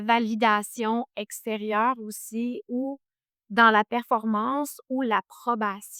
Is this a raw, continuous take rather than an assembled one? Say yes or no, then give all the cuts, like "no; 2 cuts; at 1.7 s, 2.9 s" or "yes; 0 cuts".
yes; 0 cuts